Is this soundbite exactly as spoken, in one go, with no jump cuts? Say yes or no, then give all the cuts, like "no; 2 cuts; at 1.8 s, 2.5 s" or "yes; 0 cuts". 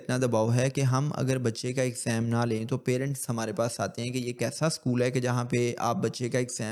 yes; 0 cuts